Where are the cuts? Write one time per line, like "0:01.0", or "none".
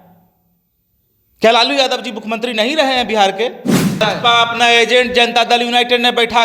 0:04.0